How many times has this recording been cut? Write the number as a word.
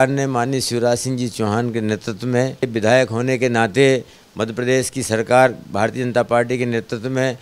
one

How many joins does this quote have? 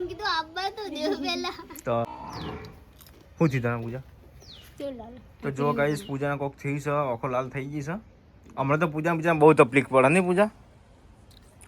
one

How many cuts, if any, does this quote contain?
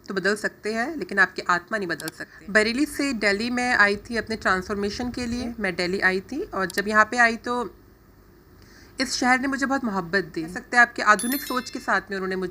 three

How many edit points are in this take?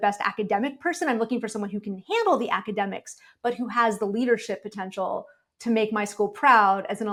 zero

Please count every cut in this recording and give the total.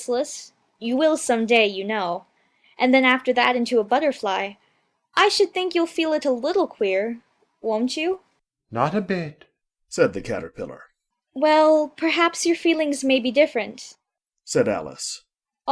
zero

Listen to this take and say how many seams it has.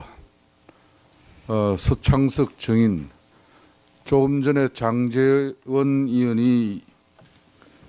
one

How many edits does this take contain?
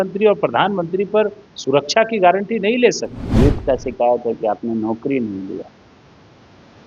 one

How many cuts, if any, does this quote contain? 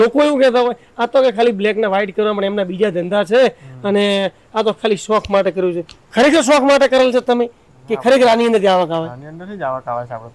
zero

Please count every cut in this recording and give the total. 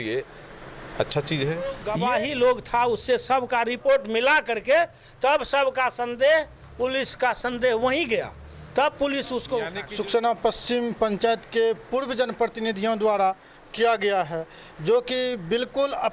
two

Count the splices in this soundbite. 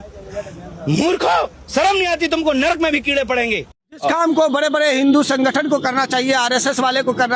one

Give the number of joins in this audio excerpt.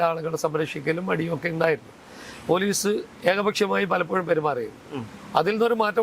zero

